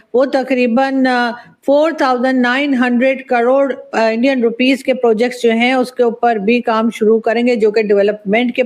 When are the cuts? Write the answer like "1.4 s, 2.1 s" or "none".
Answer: none